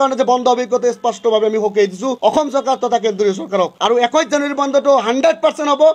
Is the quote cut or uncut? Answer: uncut